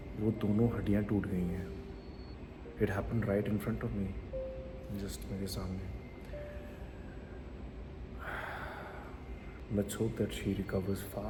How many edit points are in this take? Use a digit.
0